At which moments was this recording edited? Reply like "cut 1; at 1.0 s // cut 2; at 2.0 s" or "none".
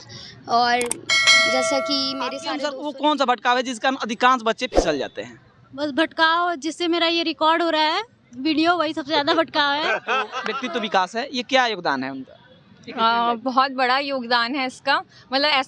cut 1; at 2.4 s // cut 2; at 10.5 s